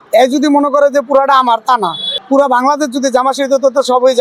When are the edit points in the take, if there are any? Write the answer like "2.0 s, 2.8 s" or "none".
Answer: none